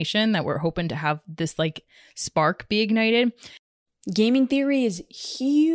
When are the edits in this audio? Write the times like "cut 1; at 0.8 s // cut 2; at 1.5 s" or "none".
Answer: cut 1; at 3.7 s